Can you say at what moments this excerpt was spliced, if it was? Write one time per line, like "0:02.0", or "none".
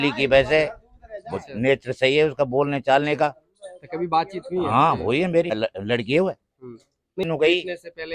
0:05.6
0:07.2